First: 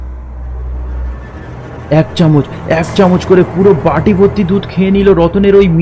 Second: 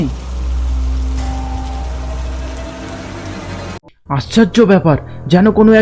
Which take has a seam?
second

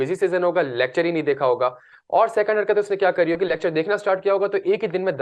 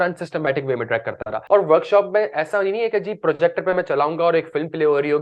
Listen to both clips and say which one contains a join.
second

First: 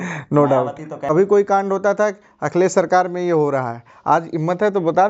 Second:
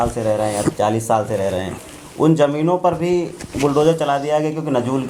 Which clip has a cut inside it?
first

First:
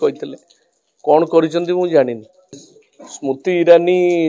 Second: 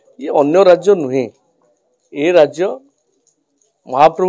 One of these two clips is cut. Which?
first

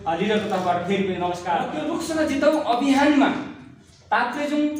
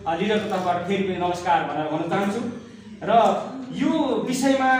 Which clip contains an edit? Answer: first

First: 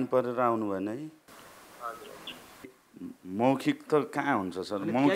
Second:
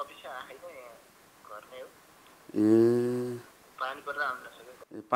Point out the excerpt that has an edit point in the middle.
first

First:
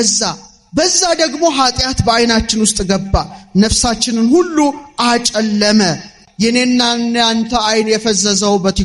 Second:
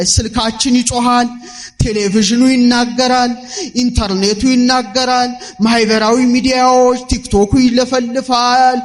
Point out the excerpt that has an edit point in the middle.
first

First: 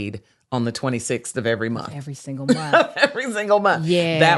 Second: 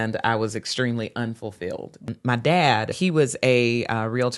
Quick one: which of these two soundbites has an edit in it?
second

